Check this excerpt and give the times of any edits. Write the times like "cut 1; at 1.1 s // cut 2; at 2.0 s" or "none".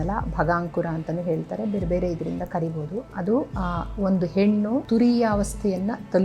cut 1; at 3.5 s // cut 2; at 4.8 s

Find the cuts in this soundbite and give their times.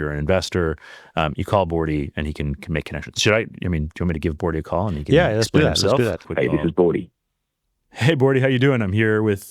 cut 1; at 6.2 s

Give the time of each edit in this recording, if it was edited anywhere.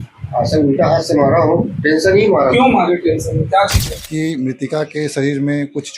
cut 1; at 3.8 s

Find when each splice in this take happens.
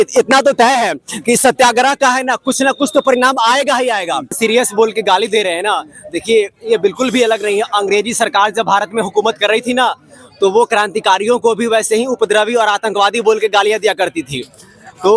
cut 1; at 4.4 s

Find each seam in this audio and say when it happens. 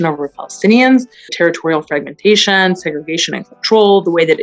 cut 1; at 1.2 s

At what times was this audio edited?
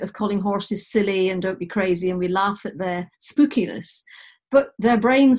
none

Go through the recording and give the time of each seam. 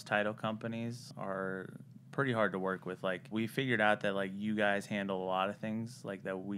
cut 1; at 1.1 s // cut 2; at 3.3 s

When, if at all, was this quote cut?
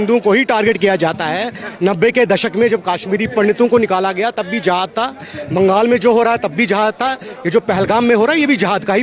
none

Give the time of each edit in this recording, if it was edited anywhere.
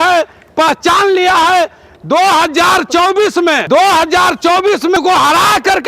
cut 1; at 3.6 s // cut 2; at 5.0 s

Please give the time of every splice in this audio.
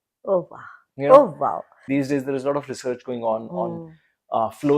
cut 1; at 1.7 s

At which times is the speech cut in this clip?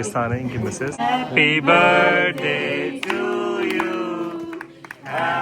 cut 1; at 1.0 s

